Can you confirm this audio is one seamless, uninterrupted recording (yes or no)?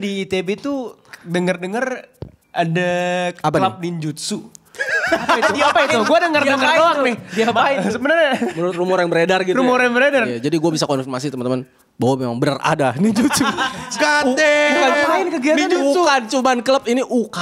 yes